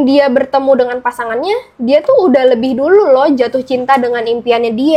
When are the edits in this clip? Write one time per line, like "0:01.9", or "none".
none